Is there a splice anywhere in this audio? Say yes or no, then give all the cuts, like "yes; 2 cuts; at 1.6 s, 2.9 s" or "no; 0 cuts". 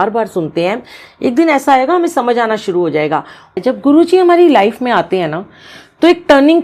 yes; 1 cut; at 3.6 s